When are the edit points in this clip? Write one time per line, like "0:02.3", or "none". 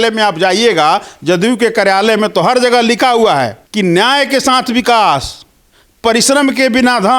0:03.6